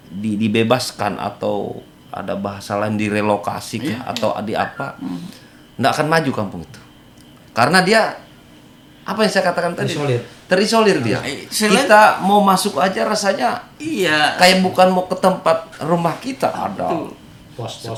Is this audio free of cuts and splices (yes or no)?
yes